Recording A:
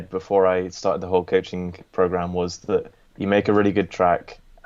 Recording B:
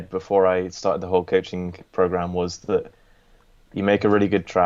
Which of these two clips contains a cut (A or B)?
A